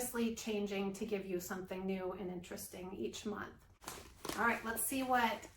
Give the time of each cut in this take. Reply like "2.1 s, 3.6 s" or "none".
3.9 s